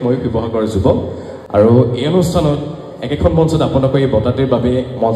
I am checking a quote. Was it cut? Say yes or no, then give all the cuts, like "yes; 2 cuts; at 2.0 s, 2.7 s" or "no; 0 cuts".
no; 0 cuts